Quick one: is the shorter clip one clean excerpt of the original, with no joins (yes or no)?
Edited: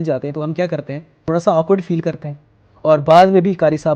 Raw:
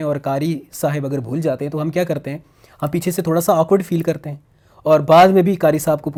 no